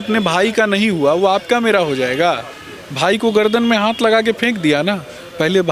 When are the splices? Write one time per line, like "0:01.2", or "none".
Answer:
none